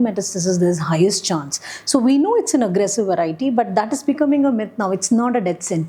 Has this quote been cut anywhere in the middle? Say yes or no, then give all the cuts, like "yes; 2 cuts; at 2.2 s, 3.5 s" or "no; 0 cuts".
no; 0 cuts